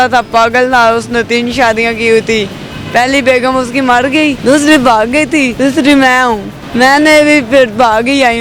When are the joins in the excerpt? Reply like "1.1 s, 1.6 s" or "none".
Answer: 4.4 s, 5.5 s, 6.6 s